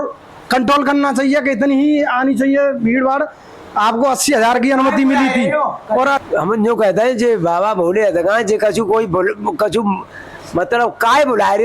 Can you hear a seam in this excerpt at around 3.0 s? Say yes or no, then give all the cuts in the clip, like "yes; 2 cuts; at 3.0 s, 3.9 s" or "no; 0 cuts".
no; 1 cut; at 6.2 s